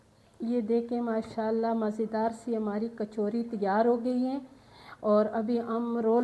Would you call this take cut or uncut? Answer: uncut